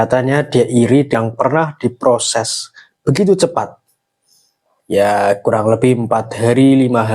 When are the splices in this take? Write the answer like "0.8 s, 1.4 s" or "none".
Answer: 1.2 s